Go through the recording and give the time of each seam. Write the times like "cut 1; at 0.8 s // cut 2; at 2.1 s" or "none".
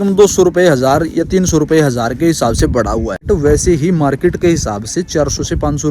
cut 1; at 3.2 s